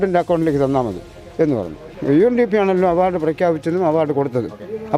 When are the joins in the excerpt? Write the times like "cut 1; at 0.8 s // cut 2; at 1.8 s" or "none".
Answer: cut 1; at 1.9 s